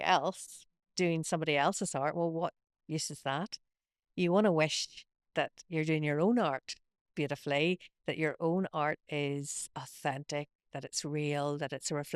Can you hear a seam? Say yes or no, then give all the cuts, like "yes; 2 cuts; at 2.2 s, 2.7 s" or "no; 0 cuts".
no; 0 cuts